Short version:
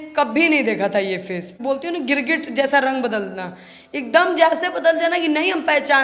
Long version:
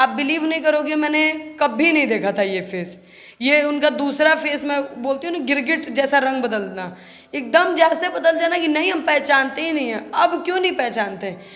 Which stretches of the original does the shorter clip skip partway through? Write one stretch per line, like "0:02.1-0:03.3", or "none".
0:03.0-0:04.9